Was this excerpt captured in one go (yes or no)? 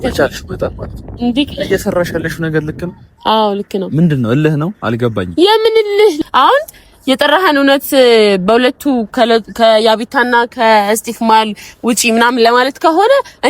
no